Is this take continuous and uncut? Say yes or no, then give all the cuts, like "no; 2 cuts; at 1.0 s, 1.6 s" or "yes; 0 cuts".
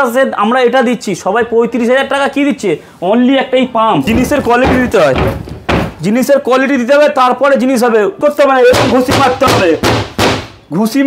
no; 2 cuts; at 4.0 s, 8.2 s